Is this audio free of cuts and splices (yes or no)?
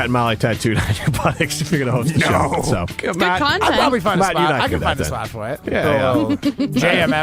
no